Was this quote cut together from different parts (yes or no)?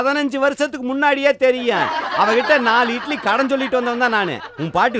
no